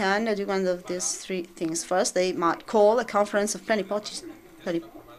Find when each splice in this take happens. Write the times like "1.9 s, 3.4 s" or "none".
2.4 s